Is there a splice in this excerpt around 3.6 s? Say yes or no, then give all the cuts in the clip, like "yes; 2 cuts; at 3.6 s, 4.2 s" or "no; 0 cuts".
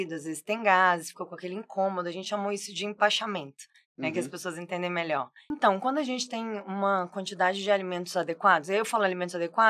no; 1 cut; at 5.4 s